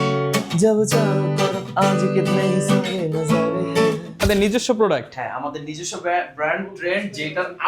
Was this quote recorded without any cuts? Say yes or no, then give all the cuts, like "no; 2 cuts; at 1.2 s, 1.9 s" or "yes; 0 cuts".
no; 1 cut; at 4.2 s